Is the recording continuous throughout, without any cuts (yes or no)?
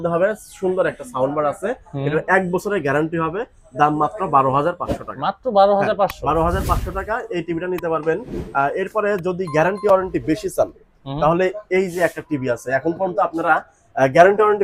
yes